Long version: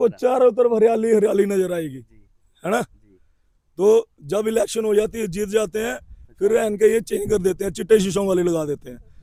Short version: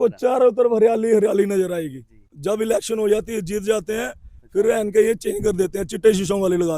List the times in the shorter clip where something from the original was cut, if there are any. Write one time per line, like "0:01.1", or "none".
0:02.3